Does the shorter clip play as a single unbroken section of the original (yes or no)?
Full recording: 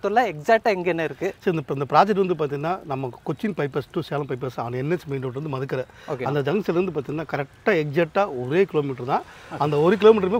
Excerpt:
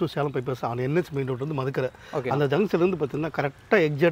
yes